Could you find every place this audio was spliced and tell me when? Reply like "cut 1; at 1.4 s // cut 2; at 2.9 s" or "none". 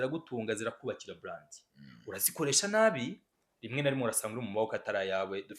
none